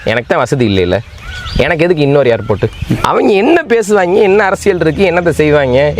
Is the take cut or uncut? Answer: cut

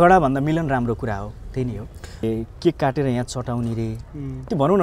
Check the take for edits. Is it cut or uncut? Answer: cut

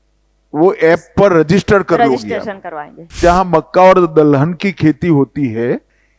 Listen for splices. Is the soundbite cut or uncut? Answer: cut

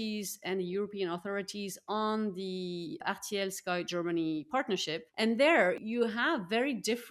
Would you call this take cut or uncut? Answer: cut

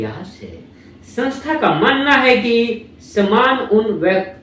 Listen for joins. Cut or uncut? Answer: uncut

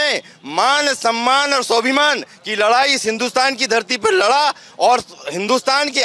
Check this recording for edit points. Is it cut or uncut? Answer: uncut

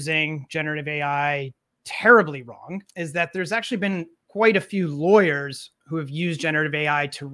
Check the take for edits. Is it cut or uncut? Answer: cut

